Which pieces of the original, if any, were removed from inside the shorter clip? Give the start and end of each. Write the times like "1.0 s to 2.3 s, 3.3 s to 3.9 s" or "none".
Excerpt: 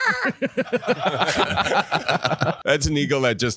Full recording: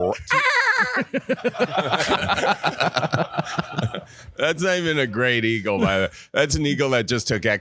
3.3 s to 6.3 s